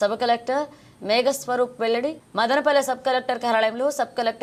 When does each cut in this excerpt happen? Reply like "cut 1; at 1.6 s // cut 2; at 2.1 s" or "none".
none